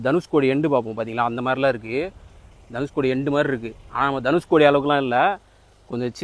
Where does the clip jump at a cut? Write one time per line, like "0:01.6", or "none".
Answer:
none

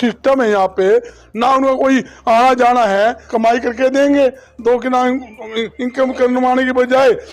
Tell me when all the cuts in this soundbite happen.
0:03.2

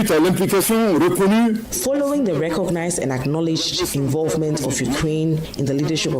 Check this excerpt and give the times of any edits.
0:01.7

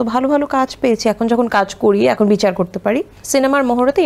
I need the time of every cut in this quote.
0:03.1

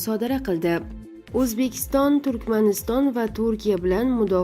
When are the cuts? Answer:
0:01.0

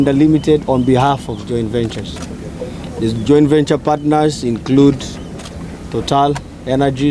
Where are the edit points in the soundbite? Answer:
none

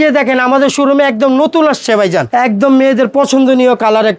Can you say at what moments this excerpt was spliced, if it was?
0:02.3

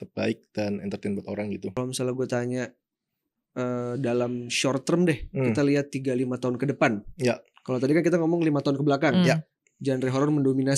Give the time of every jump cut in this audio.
0:01.7

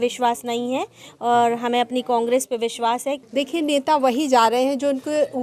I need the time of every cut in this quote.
0:03.2

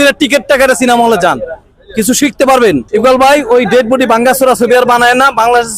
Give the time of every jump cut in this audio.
0:02.9

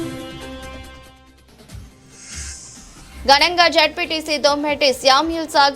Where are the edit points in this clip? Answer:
0:00.7
0:02.1

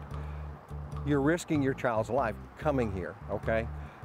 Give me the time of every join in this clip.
none

